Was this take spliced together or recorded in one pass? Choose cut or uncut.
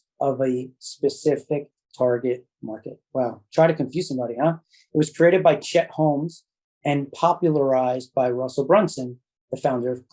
uncut